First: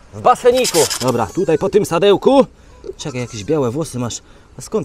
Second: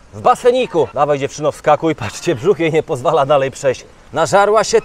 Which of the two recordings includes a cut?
first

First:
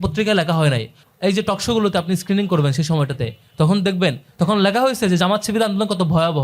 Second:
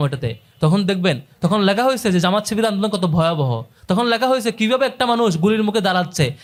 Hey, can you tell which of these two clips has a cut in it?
first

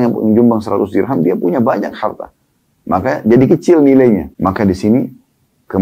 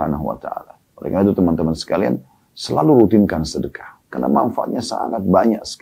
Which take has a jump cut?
first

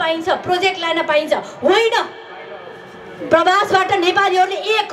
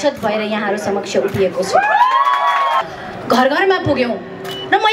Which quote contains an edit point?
second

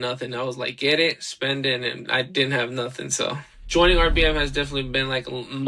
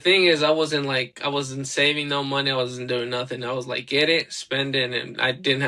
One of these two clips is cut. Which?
first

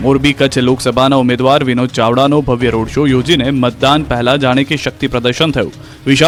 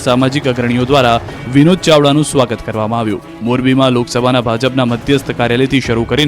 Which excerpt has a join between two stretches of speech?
second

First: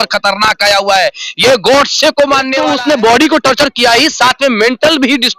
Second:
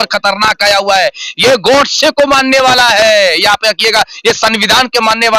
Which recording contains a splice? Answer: first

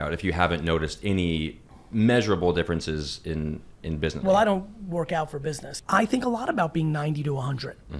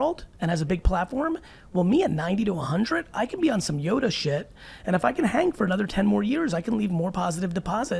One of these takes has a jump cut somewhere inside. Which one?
first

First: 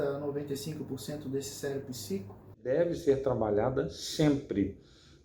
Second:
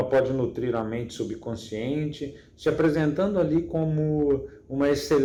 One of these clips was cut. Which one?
first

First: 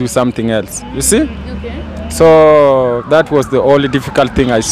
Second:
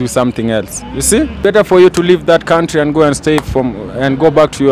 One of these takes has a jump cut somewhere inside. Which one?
second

